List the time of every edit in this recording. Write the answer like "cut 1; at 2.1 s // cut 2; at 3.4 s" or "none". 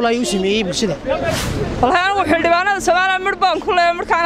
cut 1; at 1.4 s

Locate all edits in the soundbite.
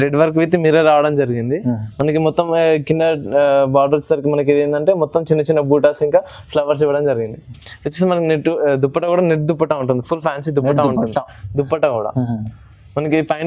none

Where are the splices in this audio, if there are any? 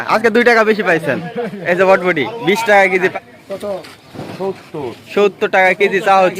cut 1; at 3.1 s

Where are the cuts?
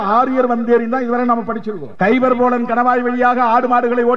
cut 1; at 1.8 s

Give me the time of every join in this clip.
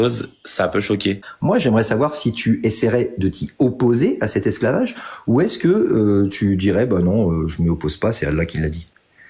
cut 1; at 1.3 s

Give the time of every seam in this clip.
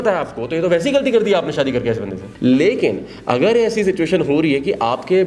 cut 1; at 2.2 s

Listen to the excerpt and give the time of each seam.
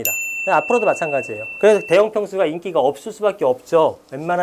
cut 1; at 1.4 s

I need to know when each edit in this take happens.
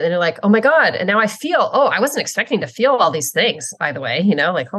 none

